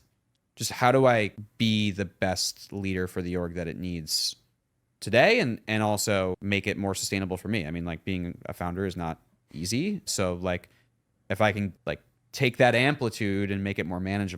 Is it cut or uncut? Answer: cut